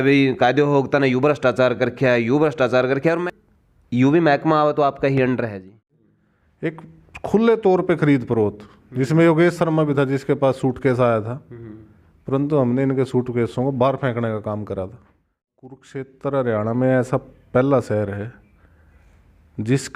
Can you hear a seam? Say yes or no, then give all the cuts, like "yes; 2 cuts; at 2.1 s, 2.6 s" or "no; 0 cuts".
yes; 3 cuts; at 3.2 s, 6.1 s, 15.8 s